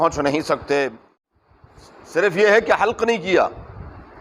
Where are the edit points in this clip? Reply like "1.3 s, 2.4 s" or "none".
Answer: 1.2 s